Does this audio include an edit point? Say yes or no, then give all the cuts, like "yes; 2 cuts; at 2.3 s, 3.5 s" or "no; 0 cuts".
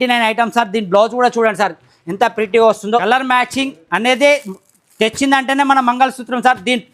yes; 1 cut; at 2.8 s